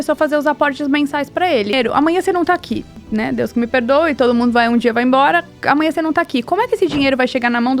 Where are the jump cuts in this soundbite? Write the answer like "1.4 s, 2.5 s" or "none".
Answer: 1.7 s, 3.0 s